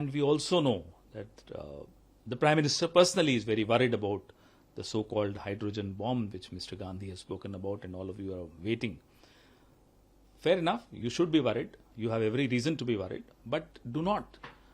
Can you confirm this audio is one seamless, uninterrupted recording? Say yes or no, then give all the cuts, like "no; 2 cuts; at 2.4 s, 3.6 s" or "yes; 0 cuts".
yes; 0 cuts